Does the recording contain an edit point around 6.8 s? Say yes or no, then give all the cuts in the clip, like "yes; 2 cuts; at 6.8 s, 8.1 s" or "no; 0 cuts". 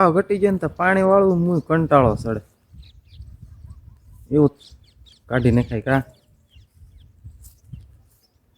no; 1 cut; at 4.5 s